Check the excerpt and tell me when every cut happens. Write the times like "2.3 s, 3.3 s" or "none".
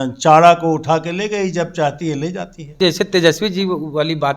2.7 s